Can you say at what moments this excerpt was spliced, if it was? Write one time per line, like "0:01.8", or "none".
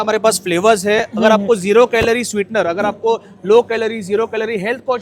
none